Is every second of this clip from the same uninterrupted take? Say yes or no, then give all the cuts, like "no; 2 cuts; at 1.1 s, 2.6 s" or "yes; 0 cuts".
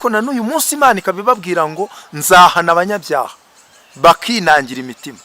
yes; 0 cuts